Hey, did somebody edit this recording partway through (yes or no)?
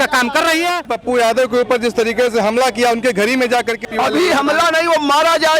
yes